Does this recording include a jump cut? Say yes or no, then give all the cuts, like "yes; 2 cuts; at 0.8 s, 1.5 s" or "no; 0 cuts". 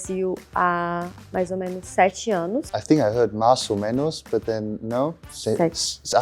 yes; 2 cuts; at 2.7 s, 5.3 s